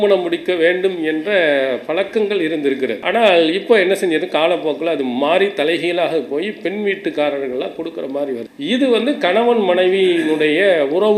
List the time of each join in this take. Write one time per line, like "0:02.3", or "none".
0:03.0
0:08.5